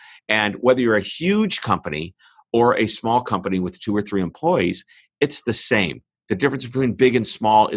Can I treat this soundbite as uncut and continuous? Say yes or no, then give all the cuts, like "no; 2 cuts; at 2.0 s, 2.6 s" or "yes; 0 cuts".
yes; 0 cuts